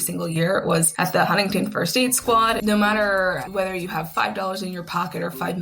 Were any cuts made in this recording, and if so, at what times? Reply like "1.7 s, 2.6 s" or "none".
0.9 s, 2.6 s, 3.5 s